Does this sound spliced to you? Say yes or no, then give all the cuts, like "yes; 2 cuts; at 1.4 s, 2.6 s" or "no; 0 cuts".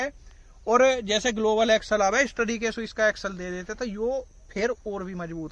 no; 0 cuts